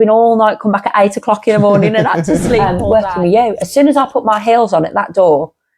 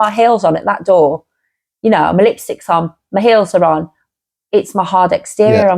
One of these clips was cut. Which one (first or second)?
first